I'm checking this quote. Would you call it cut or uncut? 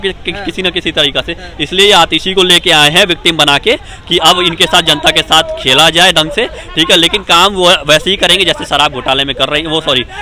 uncut